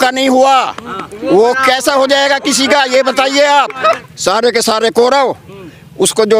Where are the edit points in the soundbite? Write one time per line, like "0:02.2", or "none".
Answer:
0:04.1